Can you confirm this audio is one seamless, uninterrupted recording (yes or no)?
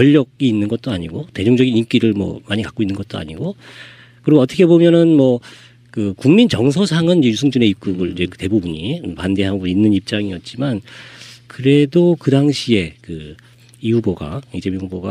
yes